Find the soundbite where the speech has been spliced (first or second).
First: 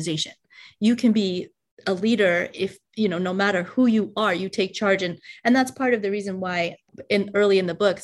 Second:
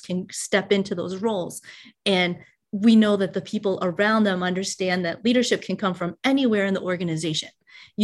first